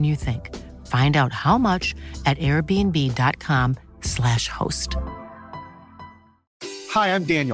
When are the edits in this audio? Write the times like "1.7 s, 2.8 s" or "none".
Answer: 6.4 s